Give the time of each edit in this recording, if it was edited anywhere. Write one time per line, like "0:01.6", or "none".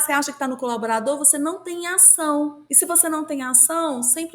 0:02.6

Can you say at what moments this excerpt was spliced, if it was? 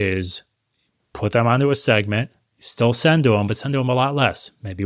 none

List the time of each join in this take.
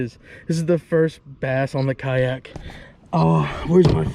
none

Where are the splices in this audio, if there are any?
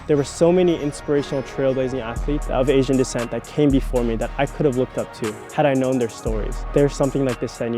0:02.4
0:05.4
0:06.5

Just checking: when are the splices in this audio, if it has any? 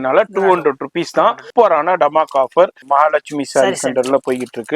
0:01.4
0:02.8

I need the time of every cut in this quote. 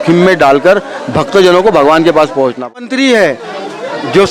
0:02.7

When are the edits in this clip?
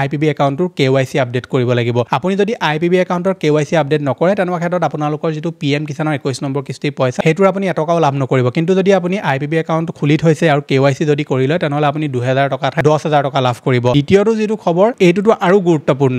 0:13.9
0:14.9

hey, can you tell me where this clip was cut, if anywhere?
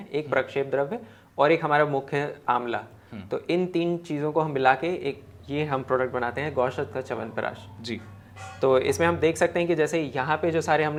none

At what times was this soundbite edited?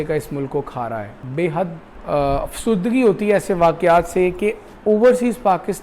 0:01.2
0:01.9
0:04.7

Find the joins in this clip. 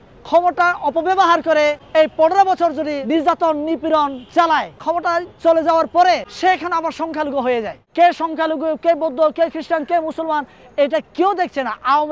0:01.8
0:03.0
0:04.8
0:06.3
0:07.8

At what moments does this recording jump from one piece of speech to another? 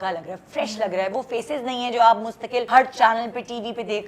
0:02.6

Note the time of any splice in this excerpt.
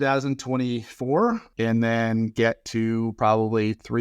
0:01.5

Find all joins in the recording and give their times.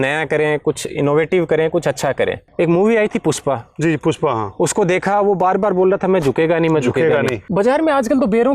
0:02.4
0:07.4

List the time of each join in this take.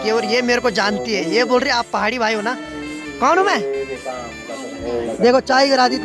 0:05.1

